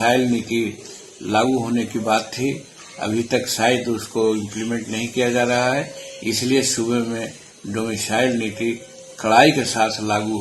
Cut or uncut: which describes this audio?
uncut